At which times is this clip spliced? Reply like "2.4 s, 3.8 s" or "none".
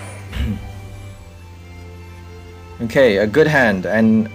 none